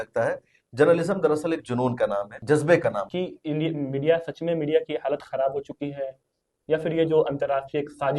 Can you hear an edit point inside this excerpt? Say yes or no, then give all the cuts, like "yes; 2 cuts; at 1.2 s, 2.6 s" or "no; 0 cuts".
yes; 2 cuts; at 2.3 s, 3.0 s